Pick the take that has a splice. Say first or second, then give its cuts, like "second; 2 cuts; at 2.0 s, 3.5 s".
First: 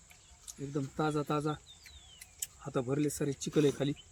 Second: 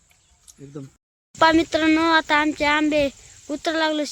second; 1 cut; at 0.9 s